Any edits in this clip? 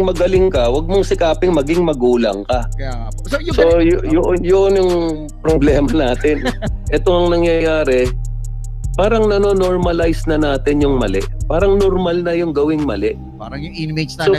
yes; 1 cut; at 6.7 s

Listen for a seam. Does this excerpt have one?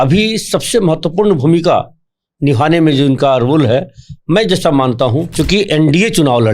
yes; 1 cut; at 5.3 s

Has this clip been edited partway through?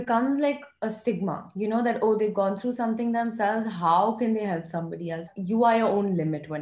yes; 1 cut; at 5.3 s

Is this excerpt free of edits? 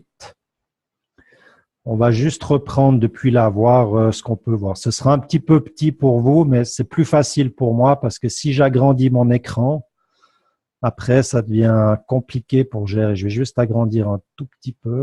yes; 0 cuts

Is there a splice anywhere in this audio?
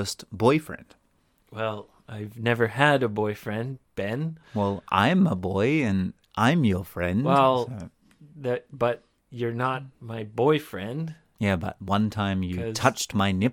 no; 0 cuts

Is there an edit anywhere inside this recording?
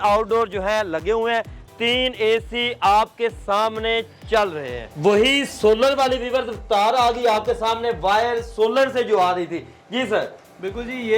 no; 0 cuts

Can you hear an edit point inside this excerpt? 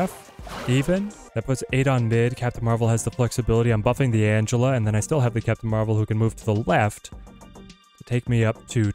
yes; 1 cut; at 1.2 s

